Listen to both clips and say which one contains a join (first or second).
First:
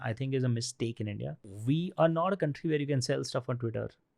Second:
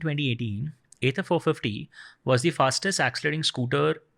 first